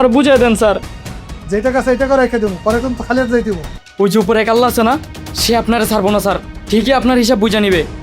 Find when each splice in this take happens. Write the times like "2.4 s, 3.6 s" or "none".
3.8 s